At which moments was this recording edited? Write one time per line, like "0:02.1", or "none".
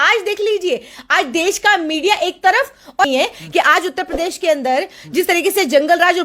0:03.1